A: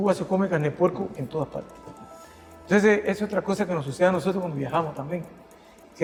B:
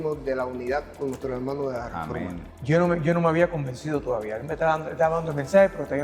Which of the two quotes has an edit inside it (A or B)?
B